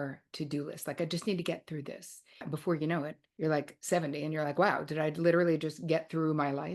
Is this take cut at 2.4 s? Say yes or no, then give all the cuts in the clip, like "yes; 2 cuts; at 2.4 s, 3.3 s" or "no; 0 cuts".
yes; 2 cuts; at 2.4 s, 3.5 s